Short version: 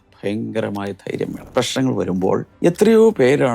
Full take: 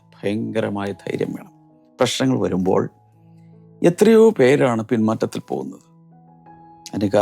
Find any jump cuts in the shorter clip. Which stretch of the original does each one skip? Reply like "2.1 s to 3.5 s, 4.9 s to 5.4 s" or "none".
1.4 s to 1.8 s, 2.9 s to 3.7 s